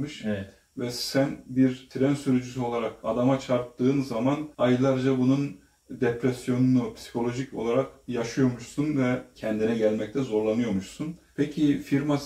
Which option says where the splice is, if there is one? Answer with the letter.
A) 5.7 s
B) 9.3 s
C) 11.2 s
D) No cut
C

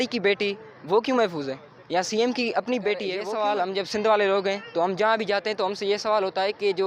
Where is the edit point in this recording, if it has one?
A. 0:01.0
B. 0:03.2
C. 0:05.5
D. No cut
B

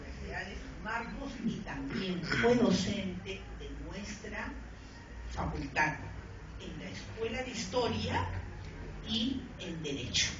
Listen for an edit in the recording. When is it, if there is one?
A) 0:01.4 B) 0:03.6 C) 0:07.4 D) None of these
C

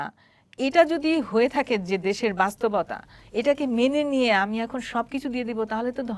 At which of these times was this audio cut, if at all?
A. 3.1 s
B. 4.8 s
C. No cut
C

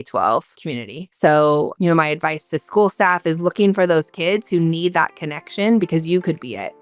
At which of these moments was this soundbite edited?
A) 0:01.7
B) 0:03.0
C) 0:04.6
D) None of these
A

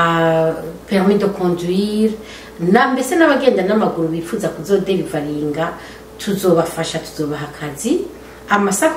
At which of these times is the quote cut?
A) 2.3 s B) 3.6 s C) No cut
C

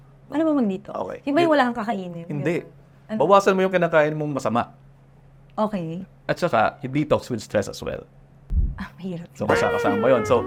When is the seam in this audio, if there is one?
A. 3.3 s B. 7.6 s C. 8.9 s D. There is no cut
D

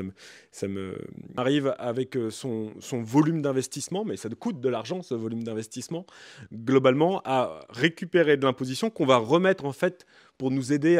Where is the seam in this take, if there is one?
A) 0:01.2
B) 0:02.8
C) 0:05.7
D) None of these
A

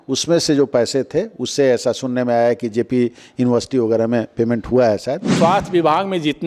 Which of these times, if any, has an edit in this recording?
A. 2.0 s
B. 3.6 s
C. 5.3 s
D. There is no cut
C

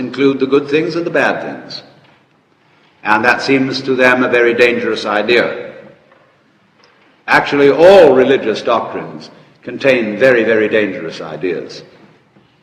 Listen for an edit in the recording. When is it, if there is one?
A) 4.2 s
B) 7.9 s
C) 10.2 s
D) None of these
A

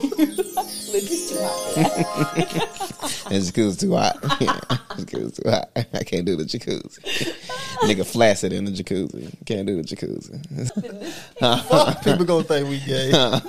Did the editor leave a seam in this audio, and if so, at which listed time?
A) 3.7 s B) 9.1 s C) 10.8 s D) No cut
C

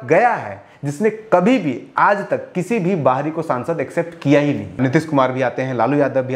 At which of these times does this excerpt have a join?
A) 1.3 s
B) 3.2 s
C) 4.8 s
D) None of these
C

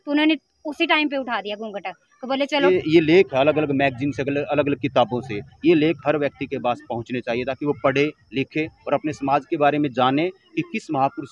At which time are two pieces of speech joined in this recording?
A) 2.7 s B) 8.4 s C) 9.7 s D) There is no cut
A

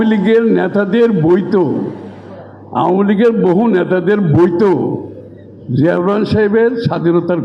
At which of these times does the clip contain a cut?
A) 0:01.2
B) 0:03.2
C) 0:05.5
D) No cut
D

